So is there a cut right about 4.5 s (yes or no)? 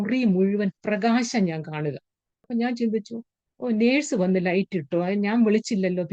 no